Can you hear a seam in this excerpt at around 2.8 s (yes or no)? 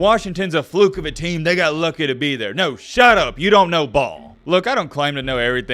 no